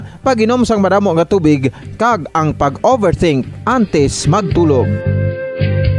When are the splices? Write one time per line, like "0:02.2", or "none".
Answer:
none